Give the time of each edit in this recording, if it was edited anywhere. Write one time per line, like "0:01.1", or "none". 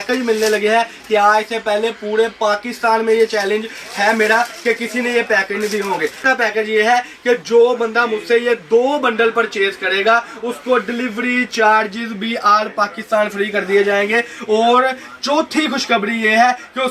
0:06.2